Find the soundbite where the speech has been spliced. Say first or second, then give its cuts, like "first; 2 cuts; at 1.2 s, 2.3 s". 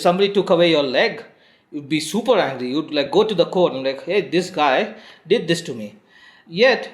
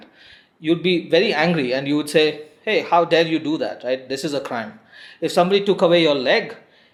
first; 1 cut; at 4.3 s